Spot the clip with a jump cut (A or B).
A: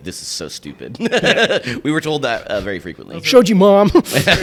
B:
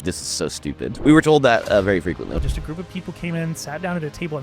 B